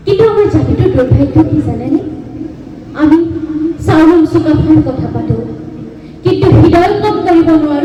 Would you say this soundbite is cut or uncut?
uncut